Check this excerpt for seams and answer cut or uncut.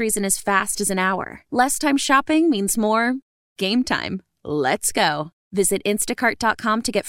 uncut